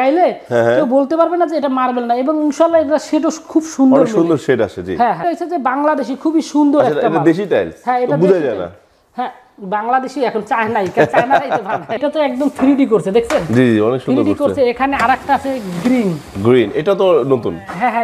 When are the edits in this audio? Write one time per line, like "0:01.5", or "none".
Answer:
0:05.2
0:12.0